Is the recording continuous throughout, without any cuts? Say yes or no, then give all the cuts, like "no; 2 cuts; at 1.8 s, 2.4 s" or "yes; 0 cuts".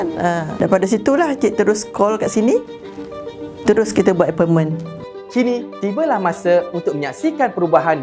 yes; 0 cuts